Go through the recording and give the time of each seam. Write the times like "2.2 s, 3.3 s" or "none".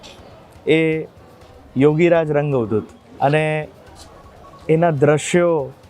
3.0 s